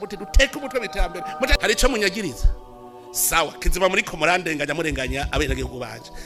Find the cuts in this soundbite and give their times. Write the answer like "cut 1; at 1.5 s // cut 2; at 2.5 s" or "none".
cut 1; at 1.6 s